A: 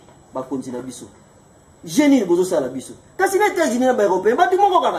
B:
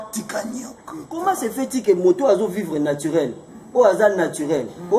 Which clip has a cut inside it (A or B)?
B